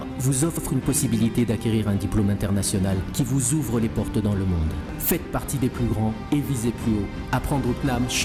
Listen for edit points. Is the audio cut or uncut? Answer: uncut